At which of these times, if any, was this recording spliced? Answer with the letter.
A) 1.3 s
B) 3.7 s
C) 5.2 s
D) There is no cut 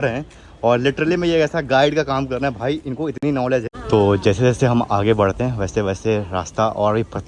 B